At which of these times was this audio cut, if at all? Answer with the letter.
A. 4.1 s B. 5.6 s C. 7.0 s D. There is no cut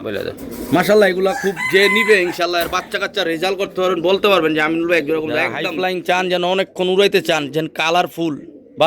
B